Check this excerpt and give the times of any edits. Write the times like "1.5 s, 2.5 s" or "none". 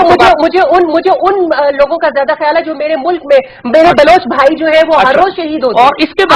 none